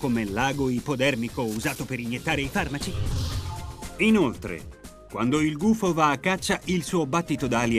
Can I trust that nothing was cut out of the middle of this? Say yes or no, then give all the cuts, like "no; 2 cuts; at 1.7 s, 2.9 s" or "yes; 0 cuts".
no; 1 cut; at 2.5 s